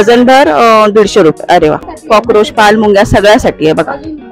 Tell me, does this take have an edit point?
yes; 1 cut; at 1.9 s

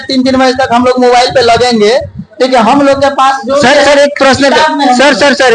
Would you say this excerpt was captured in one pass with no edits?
yes; 0 cuts

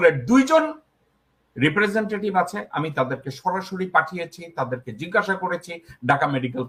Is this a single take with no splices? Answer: yes; 0 cuts

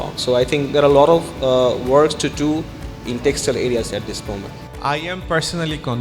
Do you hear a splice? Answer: yes; 1 cut; at 4.7 s

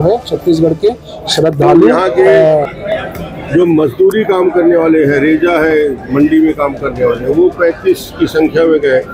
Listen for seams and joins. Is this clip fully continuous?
no; 1 cut; at 2.8 s

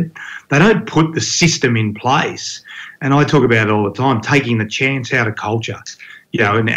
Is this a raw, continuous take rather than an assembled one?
yes; 0 cuts

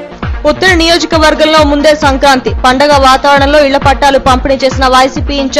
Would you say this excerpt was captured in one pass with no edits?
yes; 0 cuts

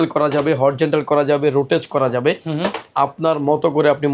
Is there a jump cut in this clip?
no; 0 cuts

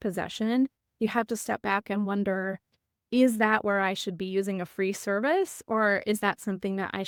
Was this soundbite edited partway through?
no; 0 cuts

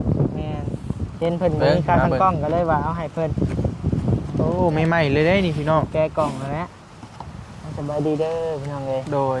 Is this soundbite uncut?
yes; 0 cuts

